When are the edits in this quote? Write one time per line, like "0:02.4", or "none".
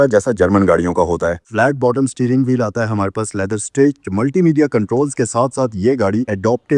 0:01.4